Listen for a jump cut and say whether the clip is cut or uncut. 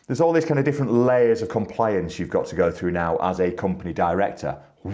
uncut